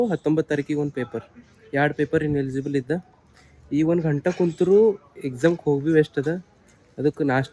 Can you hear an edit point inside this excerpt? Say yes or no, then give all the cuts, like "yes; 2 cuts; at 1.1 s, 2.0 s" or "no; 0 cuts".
no; 0 cuts